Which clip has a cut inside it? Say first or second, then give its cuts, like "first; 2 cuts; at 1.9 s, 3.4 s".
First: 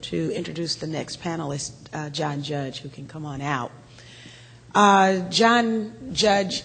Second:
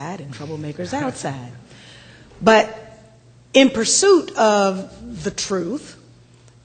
second; 1 cut; at 3.7 s